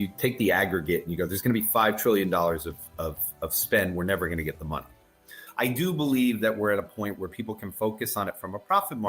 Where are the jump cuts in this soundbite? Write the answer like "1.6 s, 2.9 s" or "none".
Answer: 5.4 s